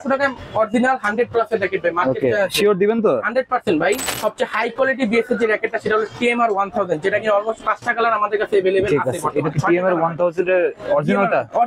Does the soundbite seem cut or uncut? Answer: cut